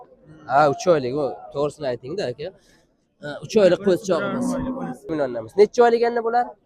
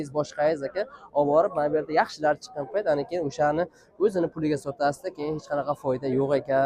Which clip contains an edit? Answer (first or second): first